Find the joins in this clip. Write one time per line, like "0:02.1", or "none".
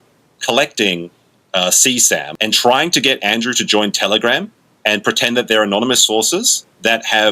0:02.3